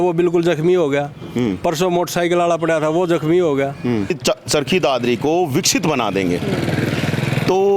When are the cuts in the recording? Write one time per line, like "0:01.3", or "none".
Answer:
0:04.2